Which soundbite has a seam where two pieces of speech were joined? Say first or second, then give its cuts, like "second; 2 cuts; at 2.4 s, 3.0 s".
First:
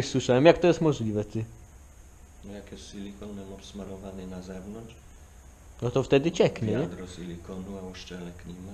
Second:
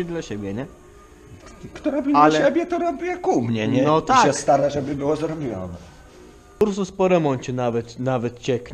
second; 1 cut; at 6.6 s